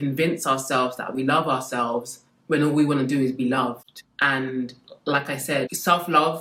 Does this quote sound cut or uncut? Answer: uncut